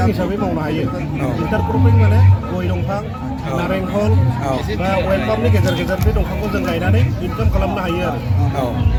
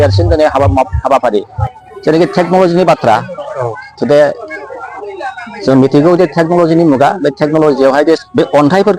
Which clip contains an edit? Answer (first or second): second